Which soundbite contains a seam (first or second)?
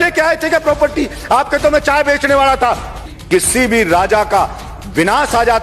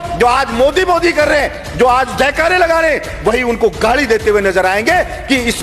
first